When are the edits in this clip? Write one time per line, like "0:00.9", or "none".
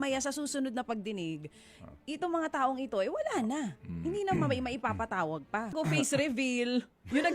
0:05.7